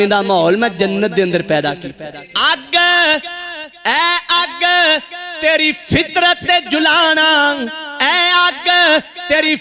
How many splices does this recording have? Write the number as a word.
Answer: one